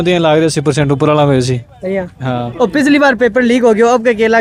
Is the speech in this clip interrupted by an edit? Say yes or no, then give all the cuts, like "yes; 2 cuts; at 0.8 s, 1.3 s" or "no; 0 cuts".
no; 0 cuts